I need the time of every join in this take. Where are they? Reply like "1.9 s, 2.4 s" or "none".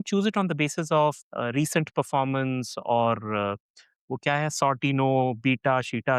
1.3 s